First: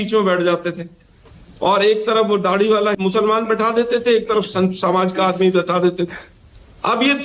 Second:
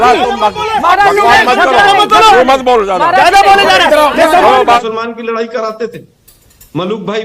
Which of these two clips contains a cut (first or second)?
second